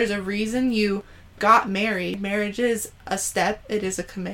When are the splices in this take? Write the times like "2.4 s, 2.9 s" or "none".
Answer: 2.2 s

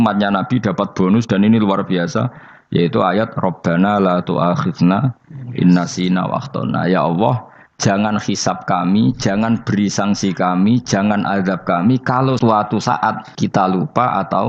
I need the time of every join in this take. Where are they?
12.4 s, 13.3 s

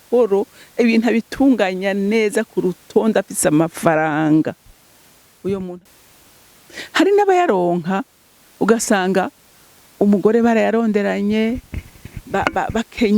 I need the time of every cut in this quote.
5.7 s

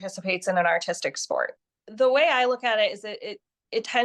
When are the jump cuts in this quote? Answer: 1.6 s

